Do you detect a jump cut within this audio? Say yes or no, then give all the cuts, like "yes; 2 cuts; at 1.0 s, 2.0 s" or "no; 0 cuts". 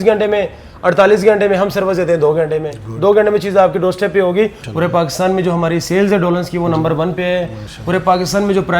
yes; 1 cut; at 4.6 s